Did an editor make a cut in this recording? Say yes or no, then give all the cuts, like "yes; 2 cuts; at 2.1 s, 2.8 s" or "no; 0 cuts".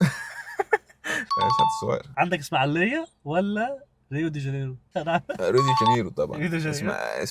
yes; 1 cut; at 2.2 s